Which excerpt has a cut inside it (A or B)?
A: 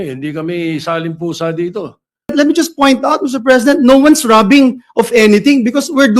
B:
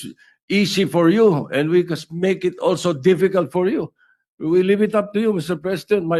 A